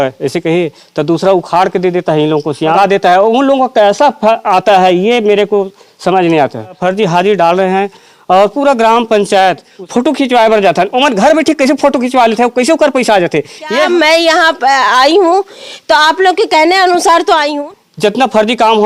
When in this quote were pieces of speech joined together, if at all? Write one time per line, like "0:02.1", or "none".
0:02.8
0:06.8
0:09.8
0:13.8
0:17.5